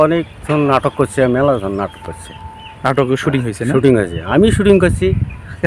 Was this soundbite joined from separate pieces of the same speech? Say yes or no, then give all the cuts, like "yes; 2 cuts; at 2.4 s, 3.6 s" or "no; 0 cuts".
no; 0 cuts